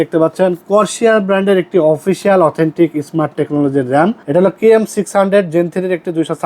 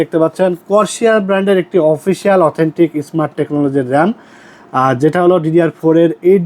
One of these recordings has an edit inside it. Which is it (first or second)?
first